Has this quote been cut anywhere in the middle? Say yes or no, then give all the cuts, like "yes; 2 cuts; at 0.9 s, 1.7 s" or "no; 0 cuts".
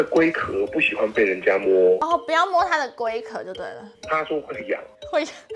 no; 0 cuts